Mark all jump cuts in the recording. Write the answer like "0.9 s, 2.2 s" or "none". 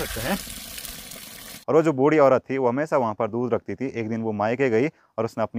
1.6 s